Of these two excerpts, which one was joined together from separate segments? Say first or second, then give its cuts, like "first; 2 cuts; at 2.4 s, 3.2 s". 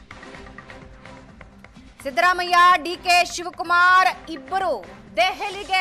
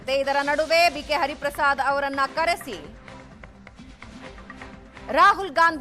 first; 1 cut; at 1.7 s